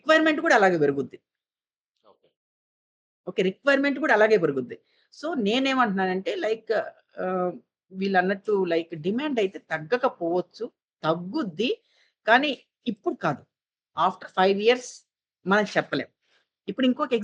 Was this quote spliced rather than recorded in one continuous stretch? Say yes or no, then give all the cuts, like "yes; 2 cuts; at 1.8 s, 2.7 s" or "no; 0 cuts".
no; 0 cuts